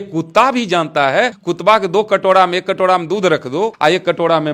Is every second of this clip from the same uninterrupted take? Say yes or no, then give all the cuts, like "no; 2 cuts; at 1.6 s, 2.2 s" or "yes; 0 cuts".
no; 2 cuts; at 1.4 s, 3.7 s